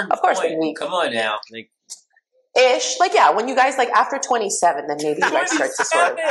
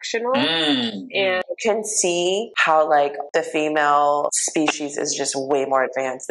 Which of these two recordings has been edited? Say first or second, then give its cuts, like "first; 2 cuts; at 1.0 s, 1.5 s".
second; 4 cuts; at 1.4 s, 2.5 s, 3.2 s, 4.4 s